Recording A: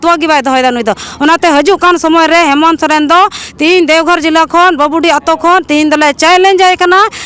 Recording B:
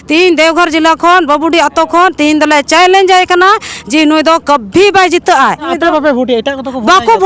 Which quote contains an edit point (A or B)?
B